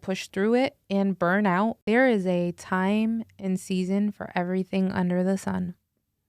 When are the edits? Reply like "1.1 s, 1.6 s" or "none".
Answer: 1.8 s